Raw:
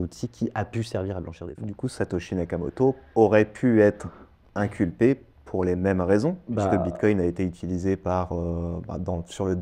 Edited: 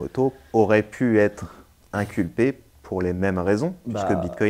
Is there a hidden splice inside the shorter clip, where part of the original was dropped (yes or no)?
no